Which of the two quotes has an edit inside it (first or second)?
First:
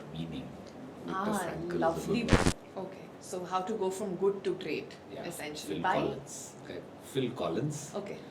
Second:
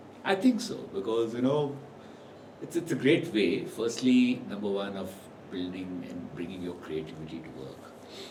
first